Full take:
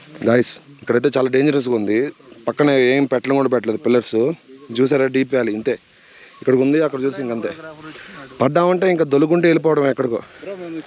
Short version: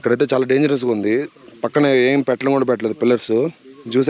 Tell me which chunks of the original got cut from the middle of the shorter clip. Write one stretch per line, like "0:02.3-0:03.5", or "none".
none